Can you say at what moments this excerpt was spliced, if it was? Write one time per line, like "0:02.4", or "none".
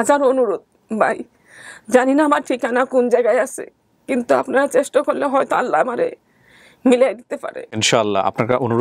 0:07.8

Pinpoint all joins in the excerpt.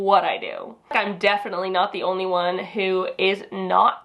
0:00.9

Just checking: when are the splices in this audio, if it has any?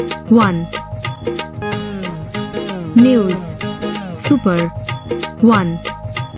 0:01.1

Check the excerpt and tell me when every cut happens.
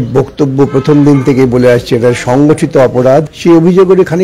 0:03.3

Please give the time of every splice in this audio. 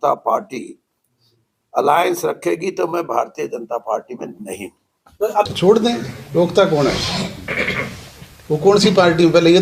0:05.5

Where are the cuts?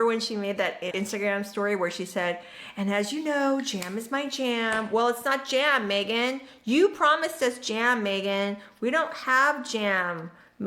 0:00.9

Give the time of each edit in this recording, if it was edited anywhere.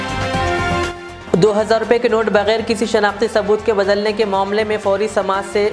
0:01.0

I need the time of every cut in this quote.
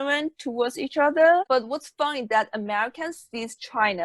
0:01.5

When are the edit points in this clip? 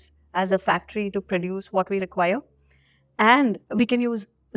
0:03.6

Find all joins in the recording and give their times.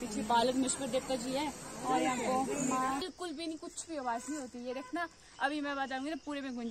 0:03.1

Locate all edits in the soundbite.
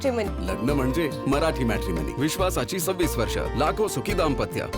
none

